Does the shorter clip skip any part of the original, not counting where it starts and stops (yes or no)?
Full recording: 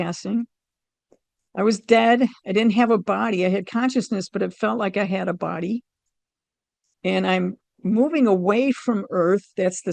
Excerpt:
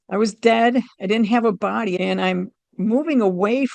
yes